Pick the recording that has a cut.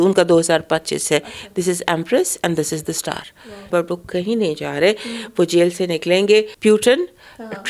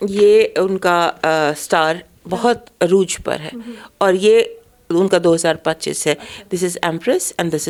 first; 2 cuts; at 3.7 s, 6.5 s

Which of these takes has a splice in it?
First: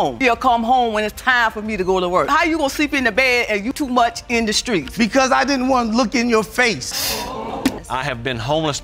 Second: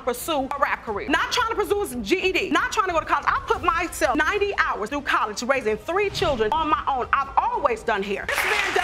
first; 1 cut; at 7.8 s

